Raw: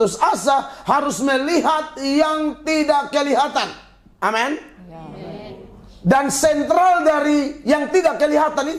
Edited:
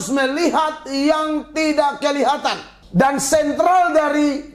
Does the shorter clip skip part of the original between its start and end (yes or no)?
yes